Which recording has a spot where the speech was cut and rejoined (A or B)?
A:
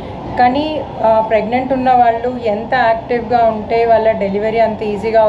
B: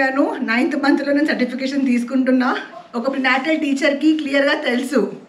B